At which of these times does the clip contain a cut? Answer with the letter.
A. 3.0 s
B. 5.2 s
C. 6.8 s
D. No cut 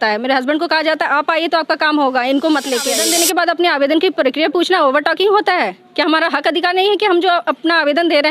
A